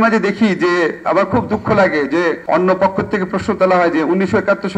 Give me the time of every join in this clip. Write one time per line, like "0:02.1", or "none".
0:02.4